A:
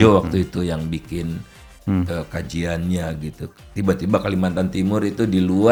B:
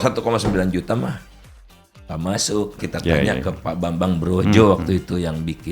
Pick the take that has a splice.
B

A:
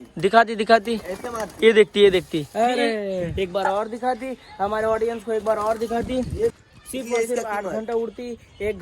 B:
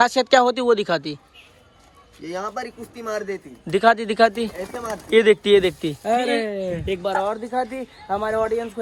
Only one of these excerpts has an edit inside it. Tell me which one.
A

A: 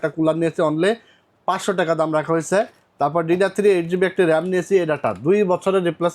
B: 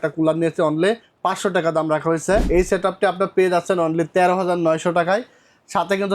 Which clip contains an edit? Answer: B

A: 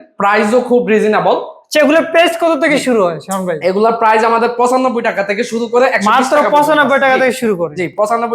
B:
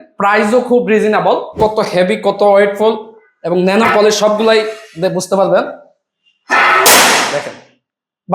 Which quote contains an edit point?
B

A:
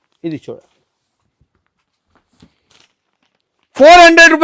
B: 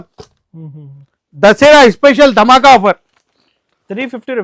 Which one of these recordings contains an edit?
A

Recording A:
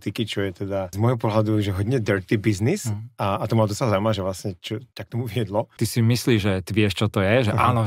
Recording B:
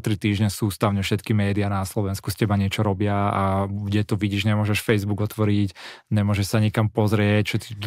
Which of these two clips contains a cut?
A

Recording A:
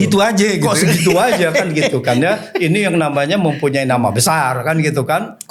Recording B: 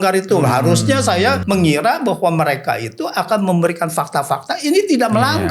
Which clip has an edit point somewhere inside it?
B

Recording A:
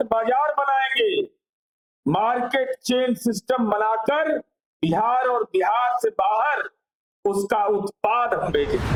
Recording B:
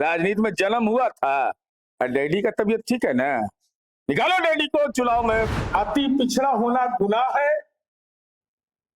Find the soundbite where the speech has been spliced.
B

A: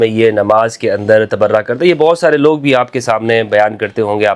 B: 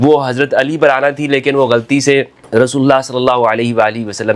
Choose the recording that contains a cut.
B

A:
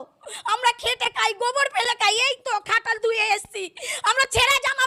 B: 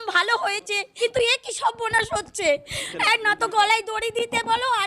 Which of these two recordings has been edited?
B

